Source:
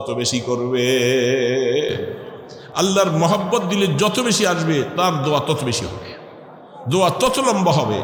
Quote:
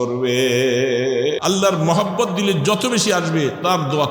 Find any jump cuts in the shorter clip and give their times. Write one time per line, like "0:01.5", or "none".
0:01.4